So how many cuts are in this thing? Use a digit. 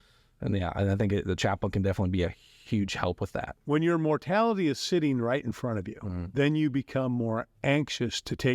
1